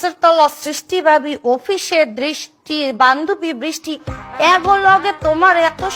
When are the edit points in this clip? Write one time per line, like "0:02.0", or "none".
none